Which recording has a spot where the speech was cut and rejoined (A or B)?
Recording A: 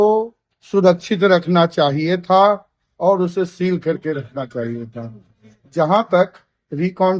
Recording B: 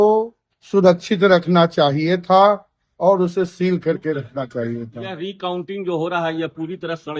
B